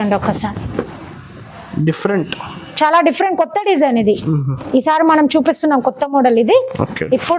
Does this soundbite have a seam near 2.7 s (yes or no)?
no